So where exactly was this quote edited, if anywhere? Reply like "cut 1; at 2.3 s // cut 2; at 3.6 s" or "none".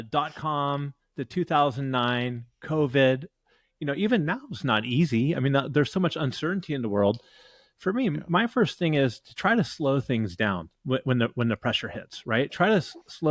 none